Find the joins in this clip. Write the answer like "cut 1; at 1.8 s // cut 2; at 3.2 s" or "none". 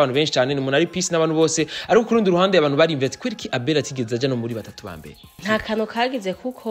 cut 1; at 5.3 s